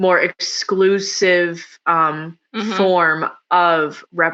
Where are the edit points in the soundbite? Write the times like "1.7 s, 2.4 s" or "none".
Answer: none